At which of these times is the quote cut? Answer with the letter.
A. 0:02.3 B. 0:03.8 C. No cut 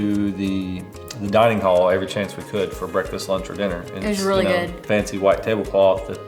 C